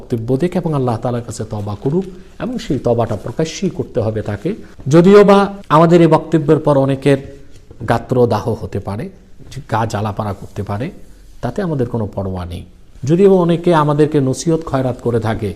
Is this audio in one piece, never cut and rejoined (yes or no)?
no